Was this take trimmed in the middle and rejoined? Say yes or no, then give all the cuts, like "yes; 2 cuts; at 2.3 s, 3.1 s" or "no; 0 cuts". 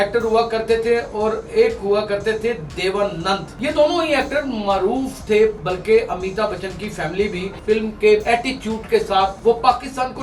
yes; 4 cuts; at 3.5 s, 7.5 s, 8.2 s, 9.4 s